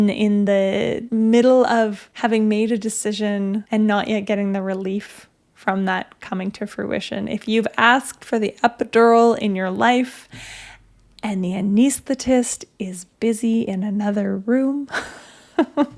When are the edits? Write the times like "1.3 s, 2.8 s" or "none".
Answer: 1.0 s, 2.0 s, 3.6 s